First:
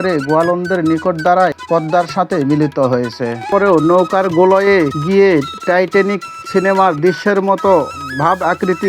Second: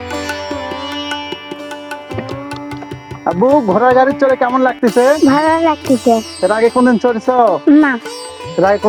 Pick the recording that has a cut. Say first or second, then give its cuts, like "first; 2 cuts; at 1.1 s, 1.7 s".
first; 1 cut; at 3.4 s